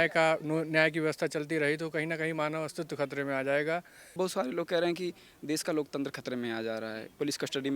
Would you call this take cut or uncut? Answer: cut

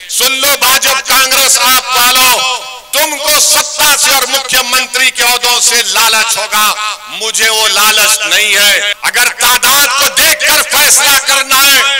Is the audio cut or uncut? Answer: cut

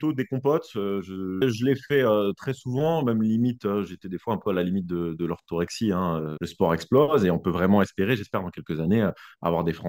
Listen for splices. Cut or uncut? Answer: cut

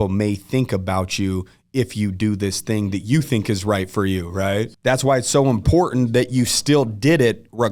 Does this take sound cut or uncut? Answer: cut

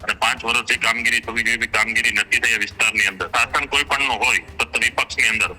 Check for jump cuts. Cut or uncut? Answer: cut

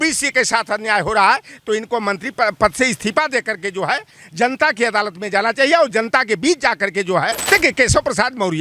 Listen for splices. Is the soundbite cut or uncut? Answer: cut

